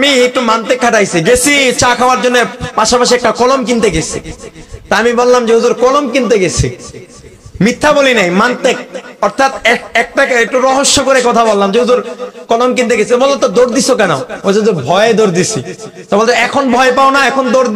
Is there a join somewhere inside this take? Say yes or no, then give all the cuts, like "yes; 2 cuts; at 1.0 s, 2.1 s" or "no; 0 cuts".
no; 0 cuts